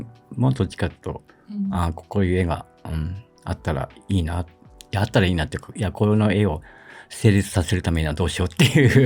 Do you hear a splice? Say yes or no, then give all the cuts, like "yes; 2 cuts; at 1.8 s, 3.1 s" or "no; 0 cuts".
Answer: no; 0 cuts